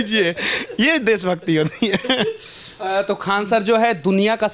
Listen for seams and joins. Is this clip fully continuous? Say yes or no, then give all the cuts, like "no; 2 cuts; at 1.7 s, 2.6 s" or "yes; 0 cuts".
yes; 0 cuts